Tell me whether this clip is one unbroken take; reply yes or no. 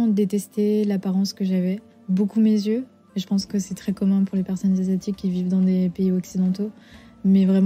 no